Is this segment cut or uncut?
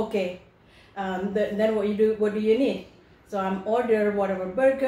uncut